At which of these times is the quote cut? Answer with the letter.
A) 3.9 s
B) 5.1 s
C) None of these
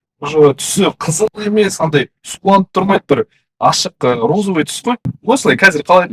B